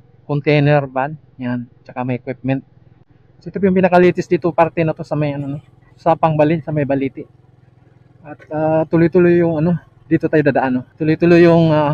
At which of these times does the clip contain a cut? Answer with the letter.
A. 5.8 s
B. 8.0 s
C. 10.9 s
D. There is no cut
C